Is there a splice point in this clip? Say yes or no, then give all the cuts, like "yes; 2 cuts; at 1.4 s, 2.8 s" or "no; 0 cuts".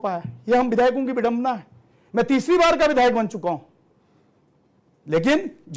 no; 0 cuts